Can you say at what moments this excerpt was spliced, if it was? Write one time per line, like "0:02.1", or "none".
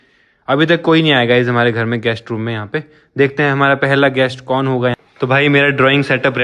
0:05.0